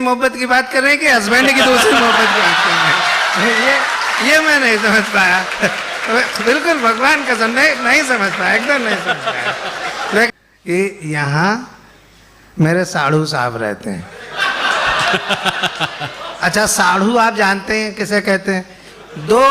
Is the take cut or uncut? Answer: cut